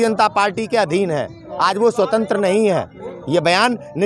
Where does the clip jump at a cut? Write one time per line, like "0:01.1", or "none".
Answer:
none